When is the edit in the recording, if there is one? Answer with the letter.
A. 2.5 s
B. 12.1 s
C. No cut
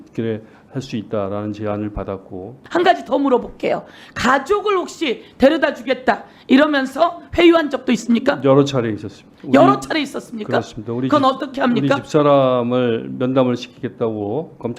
A